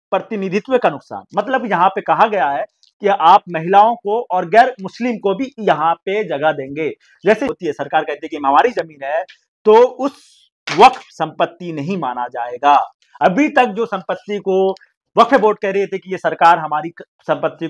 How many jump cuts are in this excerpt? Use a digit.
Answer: 1